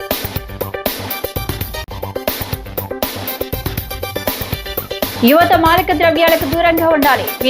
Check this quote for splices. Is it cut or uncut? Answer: cut